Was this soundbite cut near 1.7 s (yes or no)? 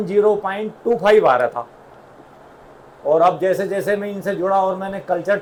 no